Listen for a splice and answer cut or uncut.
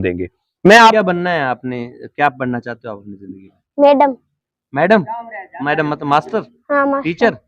cut